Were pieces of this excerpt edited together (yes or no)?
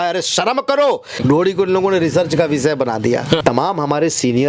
yes